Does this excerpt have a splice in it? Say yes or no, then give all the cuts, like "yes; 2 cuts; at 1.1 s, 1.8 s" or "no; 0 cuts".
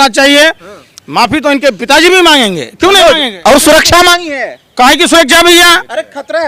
no; 0 cuts